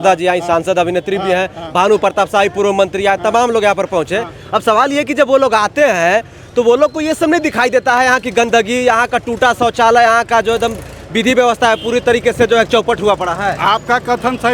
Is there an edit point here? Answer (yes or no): no